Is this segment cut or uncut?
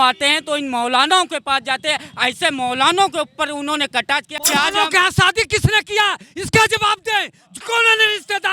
cut